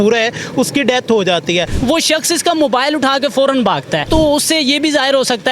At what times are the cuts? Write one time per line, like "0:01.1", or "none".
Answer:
0:01.7
0:04.1